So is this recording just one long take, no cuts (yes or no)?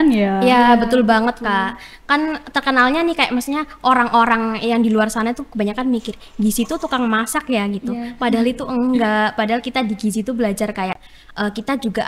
yes